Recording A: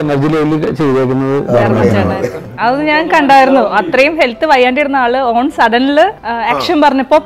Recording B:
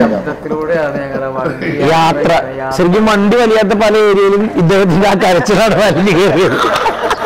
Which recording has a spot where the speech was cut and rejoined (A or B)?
A